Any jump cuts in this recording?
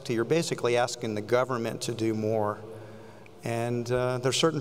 no; 0 cuts

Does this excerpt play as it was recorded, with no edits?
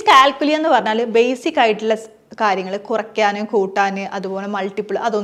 yes; 0 cuts

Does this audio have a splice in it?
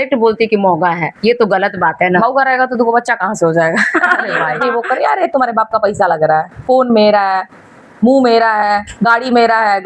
yes; 1 cut; at 4.6 s

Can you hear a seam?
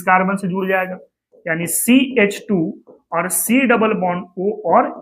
no; 0 cuts

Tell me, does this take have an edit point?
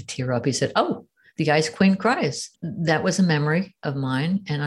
yes; 1 cut; at 2.6 s

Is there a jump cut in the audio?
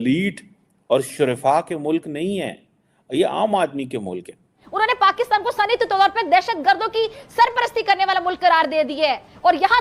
yes; 1 cut; at 4.6 s

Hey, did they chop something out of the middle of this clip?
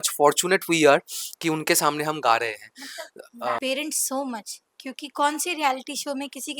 yes; 1 cut; at 3.5 s

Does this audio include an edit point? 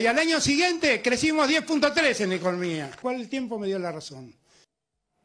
yes; 1 cut; at 2.9 s

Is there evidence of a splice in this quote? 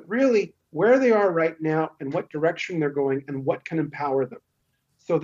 no; 0 cuts

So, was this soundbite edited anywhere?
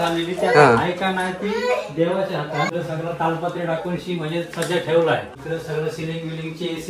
yes; 2 cuts; at 2.7 s, 5.3 s

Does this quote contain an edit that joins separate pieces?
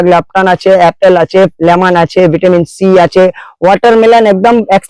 no; 0 cuts

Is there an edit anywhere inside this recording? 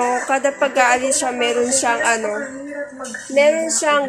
no; 0 cuts

